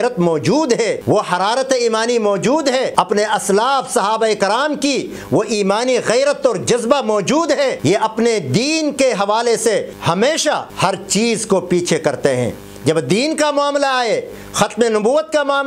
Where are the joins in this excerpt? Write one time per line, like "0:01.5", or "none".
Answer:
0:01.0
0:03.1
0:07.8
0:09.9
0:10.7